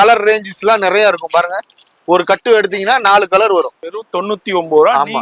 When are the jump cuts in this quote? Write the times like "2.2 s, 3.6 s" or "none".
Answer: 3.9 s